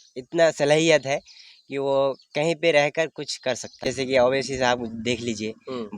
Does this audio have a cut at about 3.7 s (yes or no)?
yes